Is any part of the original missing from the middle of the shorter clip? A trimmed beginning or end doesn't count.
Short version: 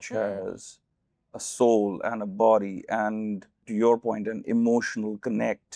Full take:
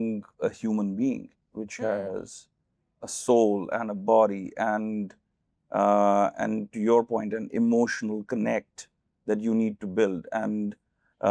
yes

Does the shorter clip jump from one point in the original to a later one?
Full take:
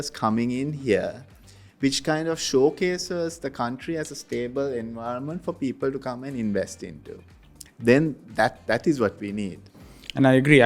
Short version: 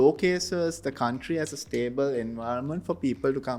no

